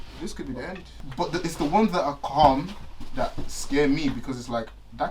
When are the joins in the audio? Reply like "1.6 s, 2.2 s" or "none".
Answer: 1.1 s